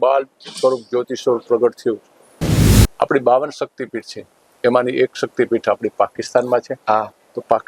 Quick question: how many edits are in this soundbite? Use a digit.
1